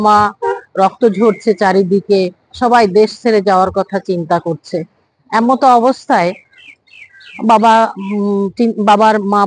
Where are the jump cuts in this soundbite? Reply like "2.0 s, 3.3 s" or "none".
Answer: none